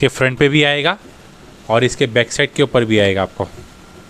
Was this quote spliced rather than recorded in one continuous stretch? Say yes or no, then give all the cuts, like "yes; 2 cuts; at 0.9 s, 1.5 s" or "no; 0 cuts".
no; 0 cuts